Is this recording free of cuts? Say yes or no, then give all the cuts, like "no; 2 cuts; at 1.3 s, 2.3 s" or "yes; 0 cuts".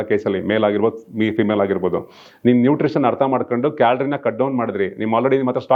yes; 0 cuts